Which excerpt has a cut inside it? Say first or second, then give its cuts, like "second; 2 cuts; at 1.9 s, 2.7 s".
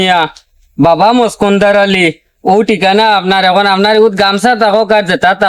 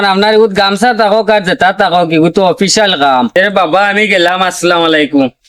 second; 1 cut; at 3.3 s